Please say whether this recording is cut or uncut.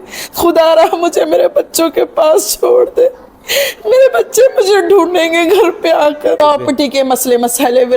cut